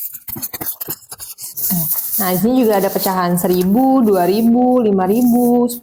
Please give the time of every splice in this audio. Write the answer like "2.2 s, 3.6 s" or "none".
none